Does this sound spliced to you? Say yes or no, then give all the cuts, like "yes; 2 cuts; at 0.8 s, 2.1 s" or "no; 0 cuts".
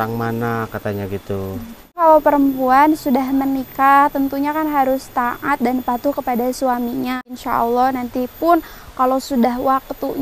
yes; 2 cuts; at 2.0 s, 7.3 s